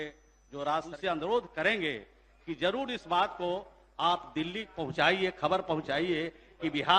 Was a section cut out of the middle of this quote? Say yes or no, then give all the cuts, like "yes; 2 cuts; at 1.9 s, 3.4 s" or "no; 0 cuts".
yes; 1 cut; at 0.9 s